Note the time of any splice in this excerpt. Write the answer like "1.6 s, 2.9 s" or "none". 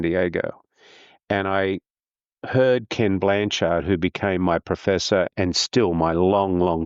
5.3 s